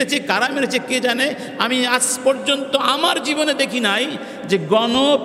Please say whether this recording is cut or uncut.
uncut